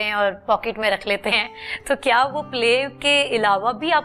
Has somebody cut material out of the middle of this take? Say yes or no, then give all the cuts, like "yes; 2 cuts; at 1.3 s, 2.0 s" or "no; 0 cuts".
no; 0 cuts